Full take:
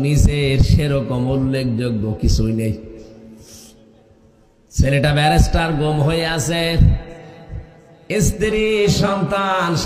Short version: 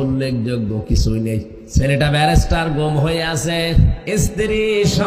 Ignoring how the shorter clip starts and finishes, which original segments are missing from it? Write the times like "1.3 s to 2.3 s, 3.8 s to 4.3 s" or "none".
2.9 s to 4.6 s, 7.0 s to 8.0 s